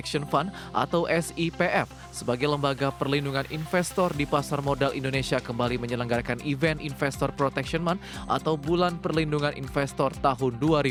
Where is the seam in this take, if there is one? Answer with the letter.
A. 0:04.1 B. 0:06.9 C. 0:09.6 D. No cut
D